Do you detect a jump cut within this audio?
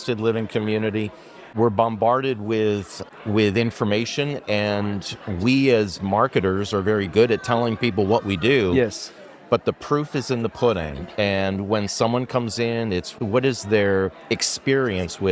yes; 2 cuts; at 1.5 s, 13.1 s

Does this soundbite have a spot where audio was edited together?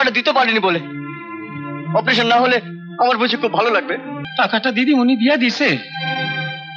yes; 1 cut; at 4.2 s

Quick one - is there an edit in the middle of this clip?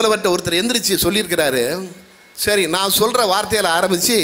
no; 0 cuts

